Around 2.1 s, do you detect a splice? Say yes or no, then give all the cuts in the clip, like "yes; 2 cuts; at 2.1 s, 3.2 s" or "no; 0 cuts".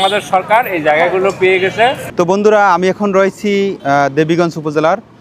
yes; 2 cuts; at 2.1 s, 3.8 s